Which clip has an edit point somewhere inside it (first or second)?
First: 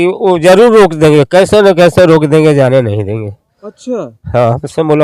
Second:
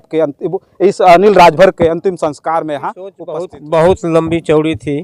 second